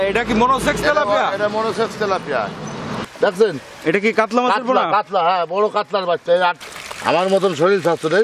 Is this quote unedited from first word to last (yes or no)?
no